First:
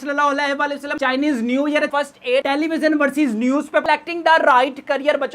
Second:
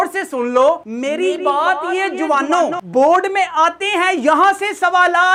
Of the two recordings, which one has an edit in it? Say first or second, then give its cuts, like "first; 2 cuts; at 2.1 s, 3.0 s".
first; 3 cuts; at 0.9 s, 2.3 s, 3.8 s